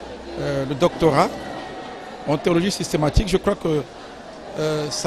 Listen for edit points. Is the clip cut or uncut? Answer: uncut